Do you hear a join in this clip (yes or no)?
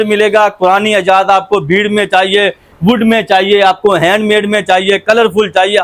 no